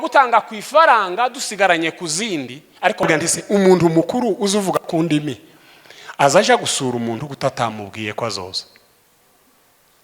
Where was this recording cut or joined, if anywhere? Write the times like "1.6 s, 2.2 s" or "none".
3.1 s